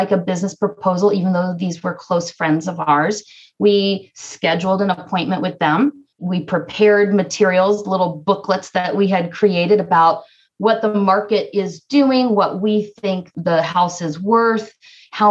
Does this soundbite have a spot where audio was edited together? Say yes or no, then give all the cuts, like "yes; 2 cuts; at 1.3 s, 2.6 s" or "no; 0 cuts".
no; 0 cuts